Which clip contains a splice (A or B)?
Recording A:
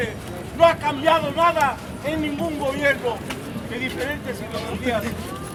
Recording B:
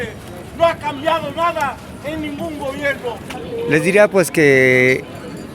B